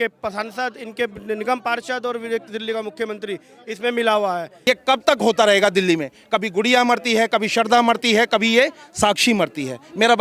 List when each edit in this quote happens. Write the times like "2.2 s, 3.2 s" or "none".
4.5 s